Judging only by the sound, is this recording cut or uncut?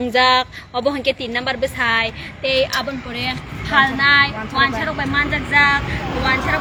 uncut